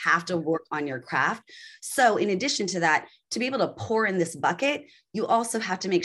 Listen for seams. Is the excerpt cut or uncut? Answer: uncut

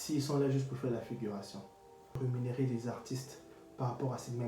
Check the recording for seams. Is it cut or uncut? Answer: cut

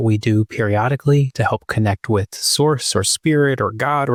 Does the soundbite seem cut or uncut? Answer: uncut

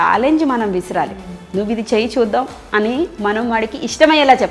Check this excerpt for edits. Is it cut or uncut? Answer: uncut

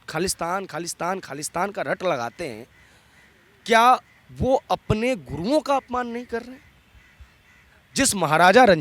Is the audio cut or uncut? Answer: uncut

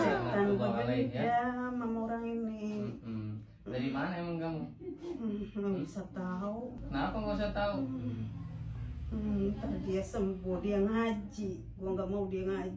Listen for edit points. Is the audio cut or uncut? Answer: uncut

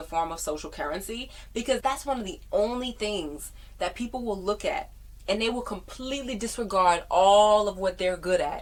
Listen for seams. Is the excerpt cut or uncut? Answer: uncut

